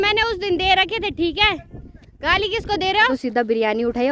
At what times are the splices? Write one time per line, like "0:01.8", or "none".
0:03.1